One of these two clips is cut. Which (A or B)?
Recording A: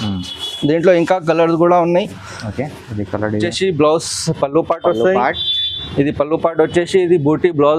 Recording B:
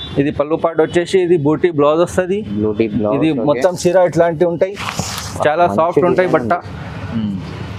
A